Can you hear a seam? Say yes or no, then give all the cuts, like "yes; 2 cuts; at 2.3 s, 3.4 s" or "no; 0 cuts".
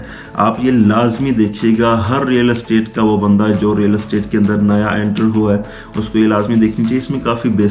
no; 0 cuts